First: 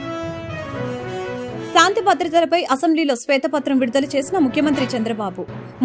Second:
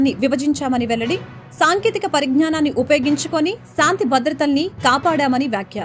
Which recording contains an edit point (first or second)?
first